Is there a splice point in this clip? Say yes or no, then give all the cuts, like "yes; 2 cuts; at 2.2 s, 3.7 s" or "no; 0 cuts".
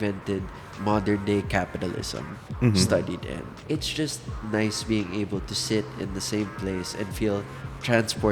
yes; 1 cut; at 3.5 s